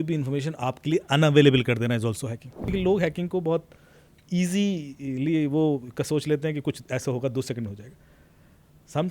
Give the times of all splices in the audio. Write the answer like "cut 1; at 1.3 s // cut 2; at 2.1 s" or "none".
cut 1; at 2.7 s